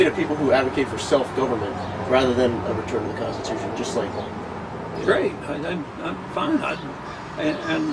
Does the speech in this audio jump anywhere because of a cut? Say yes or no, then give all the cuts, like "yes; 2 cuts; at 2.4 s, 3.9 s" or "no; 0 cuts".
yes; 1 cut; at 1.7 s